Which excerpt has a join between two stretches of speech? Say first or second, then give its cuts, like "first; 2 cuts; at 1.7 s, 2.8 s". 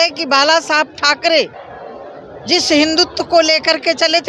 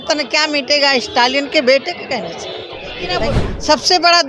second; 1 cut; at 3.2 s